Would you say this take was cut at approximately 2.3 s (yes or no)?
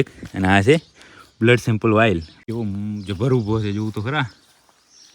yes